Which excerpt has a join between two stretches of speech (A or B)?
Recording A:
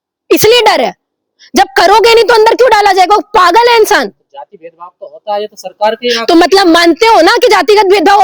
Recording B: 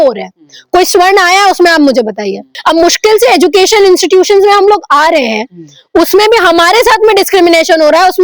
B